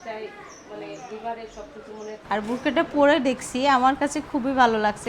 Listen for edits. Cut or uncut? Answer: cut